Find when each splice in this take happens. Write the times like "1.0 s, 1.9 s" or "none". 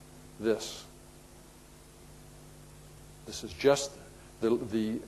1.4 s